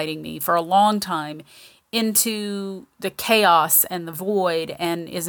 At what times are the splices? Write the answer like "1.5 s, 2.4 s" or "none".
none